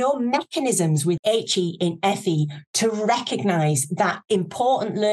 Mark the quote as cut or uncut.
cut